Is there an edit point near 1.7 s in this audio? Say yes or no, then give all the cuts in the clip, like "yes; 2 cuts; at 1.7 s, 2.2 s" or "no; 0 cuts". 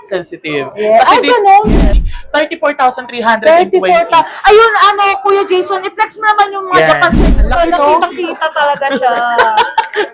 yes; 2 cuts; at 1.7 s, 7.2 s